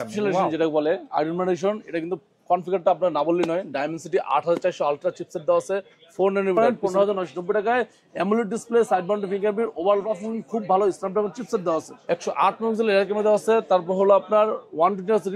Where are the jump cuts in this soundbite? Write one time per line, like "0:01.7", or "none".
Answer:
0:06.5
0:12.0